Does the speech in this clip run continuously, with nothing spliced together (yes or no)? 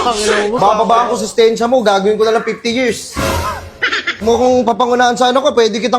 no